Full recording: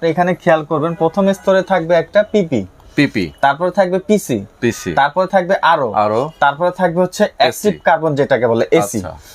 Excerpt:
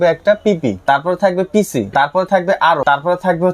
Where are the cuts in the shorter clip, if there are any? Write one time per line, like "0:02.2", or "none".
0:00.8
0:01.9
0:02.8